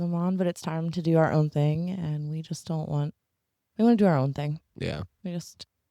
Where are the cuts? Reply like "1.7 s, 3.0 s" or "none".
none